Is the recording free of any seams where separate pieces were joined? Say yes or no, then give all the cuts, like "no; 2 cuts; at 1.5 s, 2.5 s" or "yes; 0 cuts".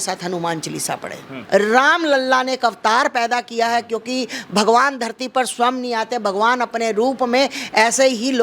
no; 1 cut; at 1.4 s